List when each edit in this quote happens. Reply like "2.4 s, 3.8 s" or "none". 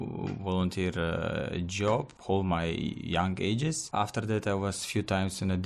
2.1 s, 3.8 s